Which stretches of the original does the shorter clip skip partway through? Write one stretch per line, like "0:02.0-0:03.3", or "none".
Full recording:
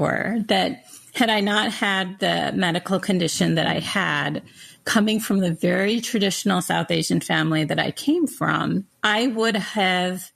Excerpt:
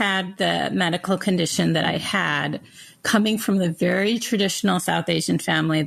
none

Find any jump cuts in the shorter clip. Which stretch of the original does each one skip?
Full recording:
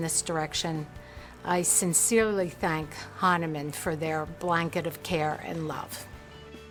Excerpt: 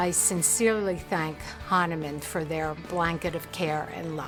none

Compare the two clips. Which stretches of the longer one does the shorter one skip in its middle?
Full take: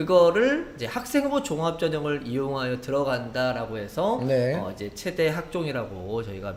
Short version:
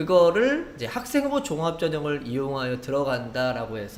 none

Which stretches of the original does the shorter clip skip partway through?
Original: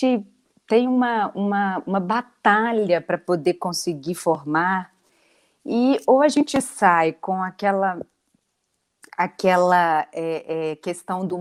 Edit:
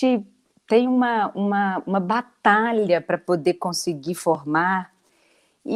none

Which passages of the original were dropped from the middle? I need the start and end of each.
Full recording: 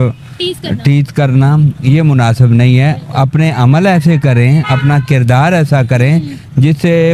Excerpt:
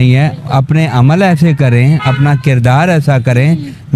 none

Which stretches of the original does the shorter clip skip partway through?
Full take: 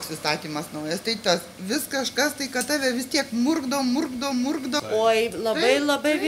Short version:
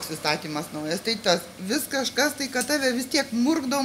none

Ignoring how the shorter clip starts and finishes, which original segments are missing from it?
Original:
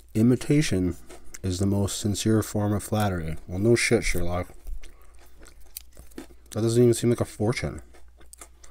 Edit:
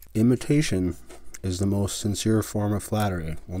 none

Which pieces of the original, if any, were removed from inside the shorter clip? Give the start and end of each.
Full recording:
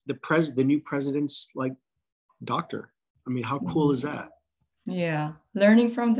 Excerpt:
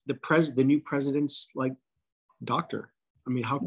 none

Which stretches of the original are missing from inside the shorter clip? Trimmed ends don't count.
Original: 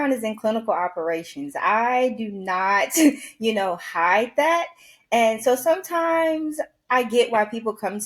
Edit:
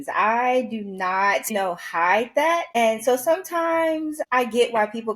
0:03.0-0:03.5
0:04.7-0:05.1
0:06.6-0:06.8

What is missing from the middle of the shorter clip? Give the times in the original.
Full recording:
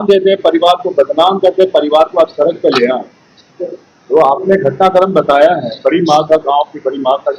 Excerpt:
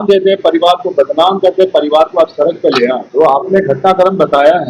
0:03.1-0:04.0

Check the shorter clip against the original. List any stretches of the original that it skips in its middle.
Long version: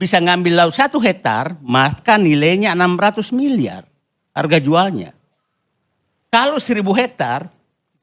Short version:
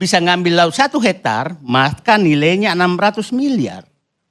none

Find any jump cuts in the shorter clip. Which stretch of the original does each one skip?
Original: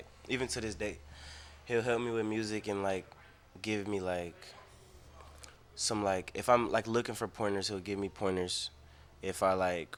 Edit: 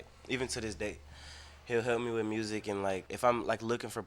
0:03.1-0:06.3

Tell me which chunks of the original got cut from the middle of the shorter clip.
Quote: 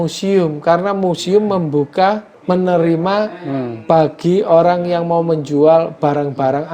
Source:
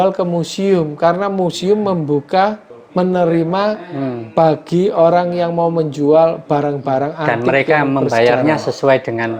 0:02.7-0:02.8

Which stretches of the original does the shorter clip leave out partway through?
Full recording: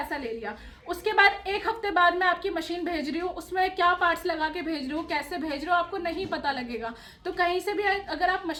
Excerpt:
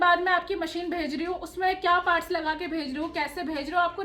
none

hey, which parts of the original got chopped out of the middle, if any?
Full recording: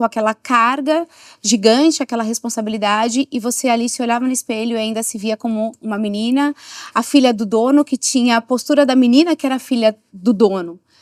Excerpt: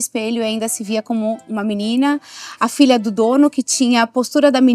none

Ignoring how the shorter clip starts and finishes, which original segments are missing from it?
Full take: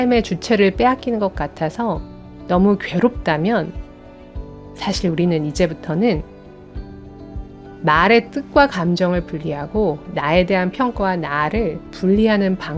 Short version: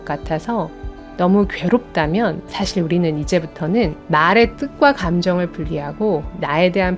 0:03.8-0:04.7
0:06.3-0:07.7

